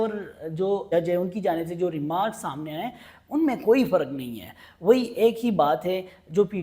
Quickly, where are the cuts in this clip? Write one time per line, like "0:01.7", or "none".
0:00.9

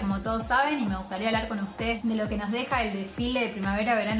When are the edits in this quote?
0:02.0

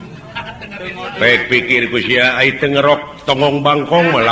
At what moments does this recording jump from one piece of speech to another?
none

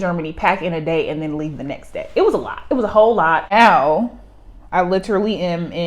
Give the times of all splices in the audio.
0:03.4

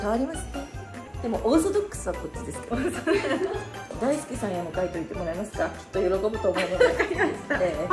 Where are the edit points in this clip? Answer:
0:01.0
0:03.9

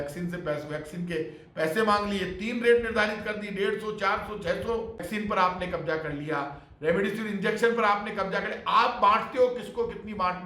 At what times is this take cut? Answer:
0:05.0

